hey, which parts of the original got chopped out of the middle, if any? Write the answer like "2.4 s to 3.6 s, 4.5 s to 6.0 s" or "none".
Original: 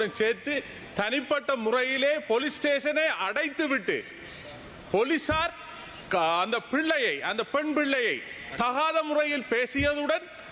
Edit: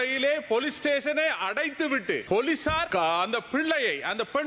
4.0 s to 4.9 s, 5.5 s to 6.0 s